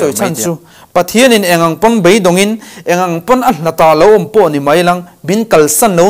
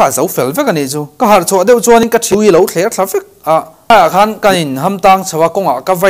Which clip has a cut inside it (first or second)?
second